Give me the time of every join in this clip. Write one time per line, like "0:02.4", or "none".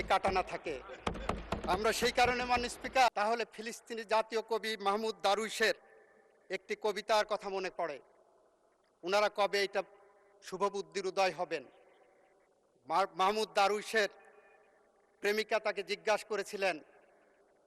0:03.1